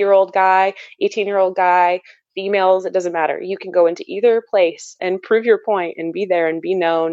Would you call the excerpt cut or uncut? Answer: cut